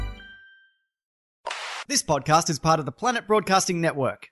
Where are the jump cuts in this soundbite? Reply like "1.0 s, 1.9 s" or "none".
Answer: 1.3 s